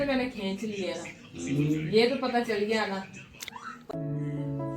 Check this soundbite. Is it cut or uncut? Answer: cut